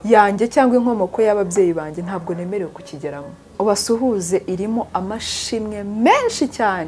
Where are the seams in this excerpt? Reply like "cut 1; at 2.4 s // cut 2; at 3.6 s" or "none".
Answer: cut 1; at 3.4 s

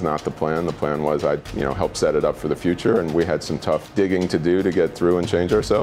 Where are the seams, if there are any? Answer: cut 1; at 1.5 s // cut 2; at 3.9 s

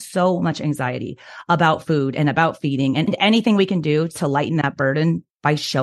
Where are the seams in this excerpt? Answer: none

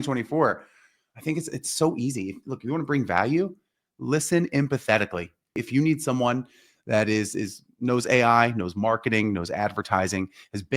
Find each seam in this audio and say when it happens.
cut 1; at 5.6 s

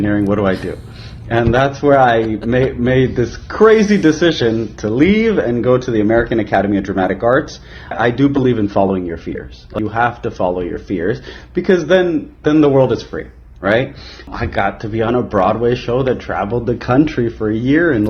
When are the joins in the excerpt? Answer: cut 1; at 7.9 s // cut 2; at 9.7 s // cut 3; at 14.3 s

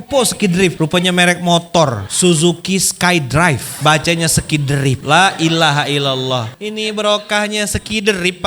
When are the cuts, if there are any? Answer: cut 1; at 0.7 s // cut 2; at 2.0 s // cut 3; at 3.7 s // cut 4; at 5.0 s // cut 5; at 6.5 s

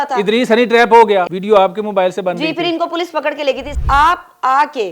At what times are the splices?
cut 1; at 1.3 s // cut 2; at 3.7 s

